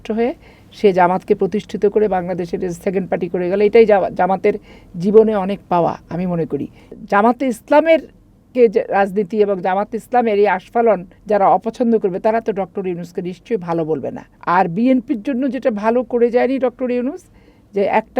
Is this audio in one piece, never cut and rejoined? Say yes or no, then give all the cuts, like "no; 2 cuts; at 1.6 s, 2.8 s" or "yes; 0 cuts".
no; 3 cuts; at 6.9 s, 11.1 s, 14.3 s